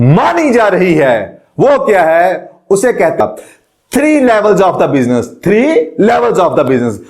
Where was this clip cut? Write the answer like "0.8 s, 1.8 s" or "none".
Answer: 3.2 s